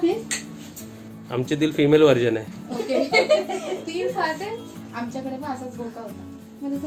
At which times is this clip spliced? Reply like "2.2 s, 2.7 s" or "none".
none

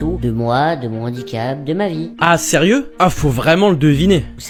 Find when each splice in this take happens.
none

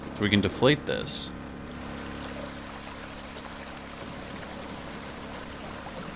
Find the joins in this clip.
1.8 s

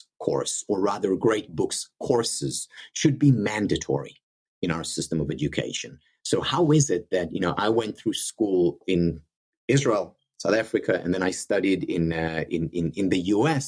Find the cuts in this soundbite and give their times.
8.8 s

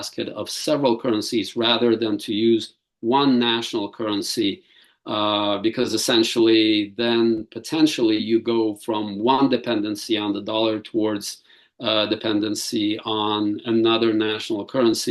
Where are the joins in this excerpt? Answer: none

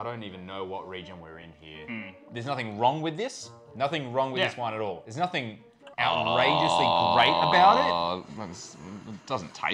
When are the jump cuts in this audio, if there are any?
2.2 s

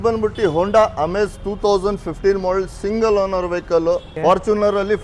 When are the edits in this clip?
4.1 s

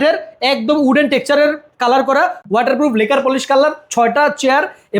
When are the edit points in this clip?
none

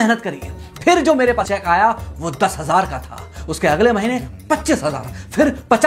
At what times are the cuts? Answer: 1.4 s

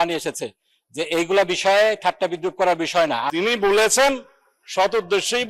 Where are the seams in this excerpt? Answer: 3.3 s

